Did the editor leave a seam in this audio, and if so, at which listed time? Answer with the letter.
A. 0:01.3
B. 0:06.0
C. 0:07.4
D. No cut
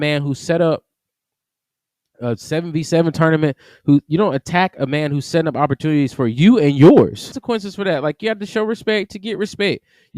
C